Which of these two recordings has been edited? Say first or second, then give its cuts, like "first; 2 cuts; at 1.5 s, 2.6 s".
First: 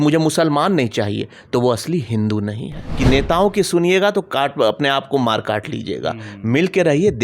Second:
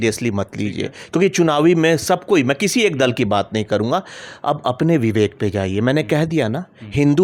first; 1 cut; at 2.8 s